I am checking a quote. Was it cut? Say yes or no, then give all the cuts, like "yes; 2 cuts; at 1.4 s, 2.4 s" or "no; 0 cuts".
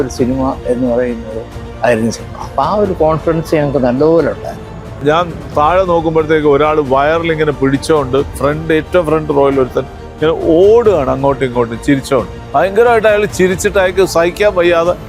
yes; 3 cuts; at 5.0 s, 8.3 s, 12.4 s